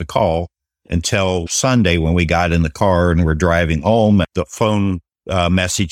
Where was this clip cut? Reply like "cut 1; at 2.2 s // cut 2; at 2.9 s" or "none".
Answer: none